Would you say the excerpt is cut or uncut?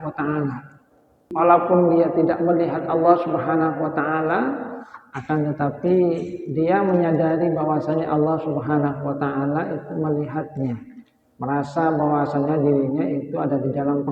cut